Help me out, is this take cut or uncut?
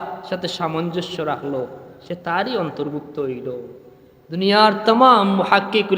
uncut